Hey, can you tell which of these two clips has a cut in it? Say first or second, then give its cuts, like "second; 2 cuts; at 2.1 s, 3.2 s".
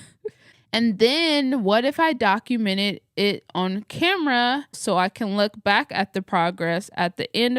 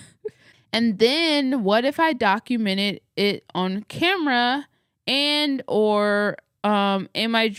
first; 1 cut; at 4.8 s